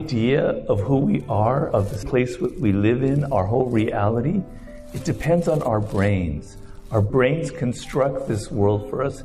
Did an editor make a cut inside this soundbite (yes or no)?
yes